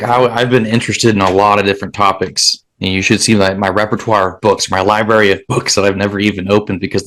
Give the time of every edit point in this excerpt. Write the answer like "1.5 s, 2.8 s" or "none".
none